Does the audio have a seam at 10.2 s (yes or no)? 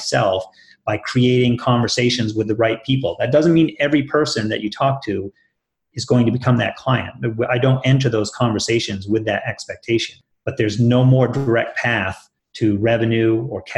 yes